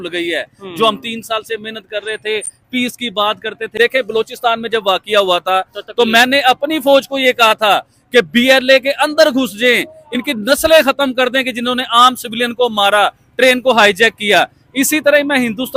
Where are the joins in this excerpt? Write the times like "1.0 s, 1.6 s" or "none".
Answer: 3.7 s